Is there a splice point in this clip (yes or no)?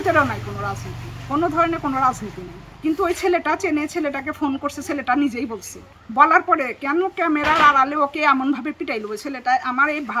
no